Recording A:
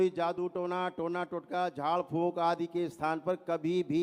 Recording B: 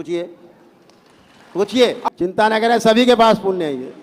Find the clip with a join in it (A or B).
B